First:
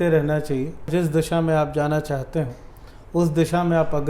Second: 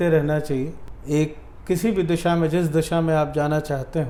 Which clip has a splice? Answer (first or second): first